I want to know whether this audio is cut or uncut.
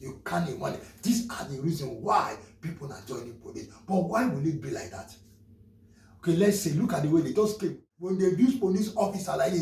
cut